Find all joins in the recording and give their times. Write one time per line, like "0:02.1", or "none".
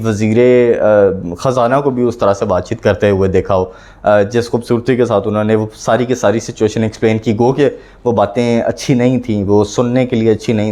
none